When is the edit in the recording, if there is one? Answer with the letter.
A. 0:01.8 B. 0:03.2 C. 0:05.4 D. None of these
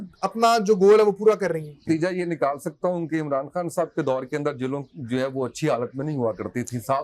A